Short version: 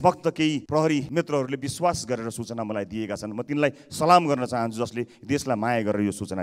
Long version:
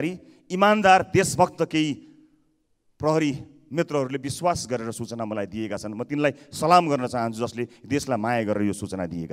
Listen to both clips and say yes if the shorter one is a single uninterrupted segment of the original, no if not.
no